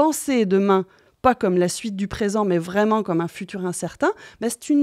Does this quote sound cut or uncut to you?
uncut